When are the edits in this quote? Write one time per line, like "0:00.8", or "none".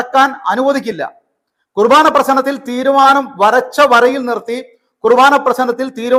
none